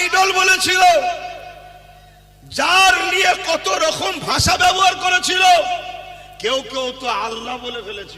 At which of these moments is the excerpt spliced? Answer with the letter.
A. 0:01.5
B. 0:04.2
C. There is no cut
C